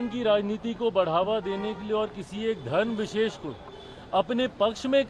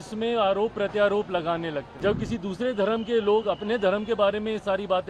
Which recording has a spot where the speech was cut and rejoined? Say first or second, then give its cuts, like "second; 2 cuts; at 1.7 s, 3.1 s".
second; 1 cut; at 1.9 s